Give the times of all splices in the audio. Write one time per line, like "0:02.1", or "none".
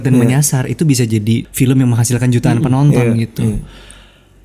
0:01.5